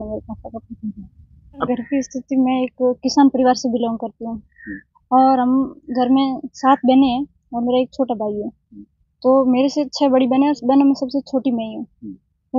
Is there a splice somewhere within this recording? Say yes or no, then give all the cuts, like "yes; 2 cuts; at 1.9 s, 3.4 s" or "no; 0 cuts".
yes; 1 cut; at 1.8 s